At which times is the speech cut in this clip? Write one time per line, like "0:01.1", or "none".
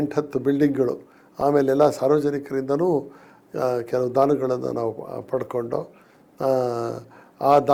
none